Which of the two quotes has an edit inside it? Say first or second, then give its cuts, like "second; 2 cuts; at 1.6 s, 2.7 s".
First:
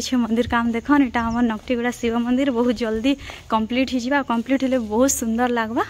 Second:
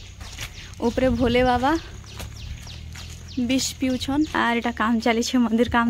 second; 1 cut; at 4.3 s